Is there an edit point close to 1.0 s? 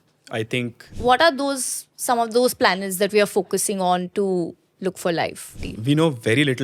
yes; 2 cuts; at 1.0 s, 5.7 s

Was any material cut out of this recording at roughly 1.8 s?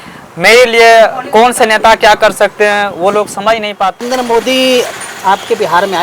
no; 1 cut; at 4.0 s

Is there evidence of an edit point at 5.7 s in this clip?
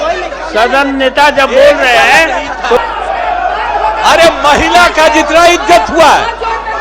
no; 1 cut; at 2.8 s

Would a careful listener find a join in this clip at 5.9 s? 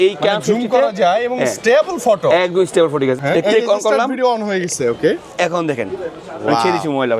no; 1 cut; at 3.2 s

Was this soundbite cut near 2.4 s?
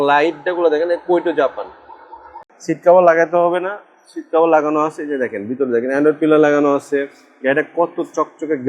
yes; 1 cut; at 2.4 s

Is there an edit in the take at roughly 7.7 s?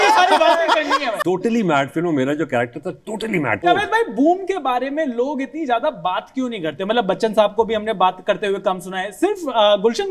no; 2 cuts; at 1.1 s, 3.6 s

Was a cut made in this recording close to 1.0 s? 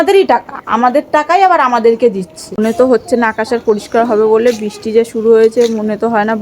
no; 1 cut; at 2.6 s

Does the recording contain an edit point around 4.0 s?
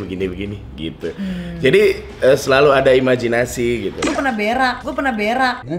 yes; 1 cut; at 4.0 s

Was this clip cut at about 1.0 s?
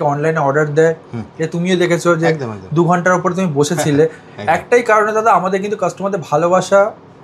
no; 0 cuts

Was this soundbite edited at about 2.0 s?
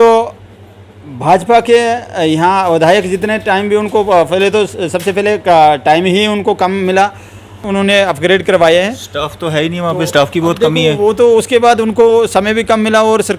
no; 1 cut; at 7.6 s

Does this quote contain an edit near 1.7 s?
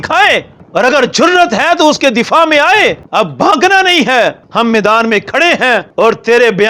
no; 3 cuts; at 3.0 s, 4.4 s, 5.9 s

